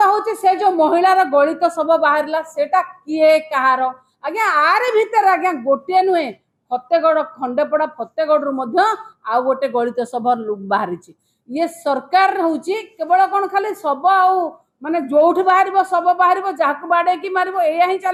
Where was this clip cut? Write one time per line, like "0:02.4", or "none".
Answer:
none